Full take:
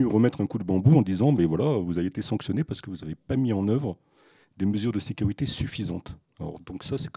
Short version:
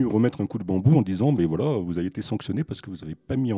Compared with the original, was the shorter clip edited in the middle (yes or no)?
no